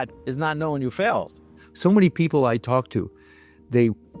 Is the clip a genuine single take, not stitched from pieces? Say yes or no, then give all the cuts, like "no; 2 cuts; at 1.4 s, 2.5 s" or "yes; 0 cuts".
yes; 0 cuts